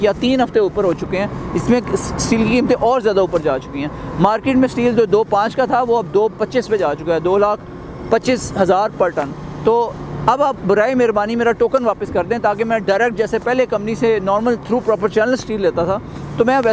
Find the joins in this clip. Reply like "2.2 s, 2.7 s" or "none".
none